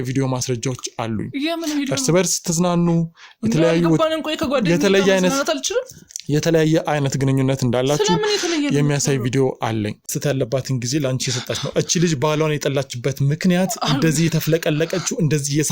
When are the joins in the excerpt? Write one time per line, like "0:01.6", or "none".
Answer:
0:10.1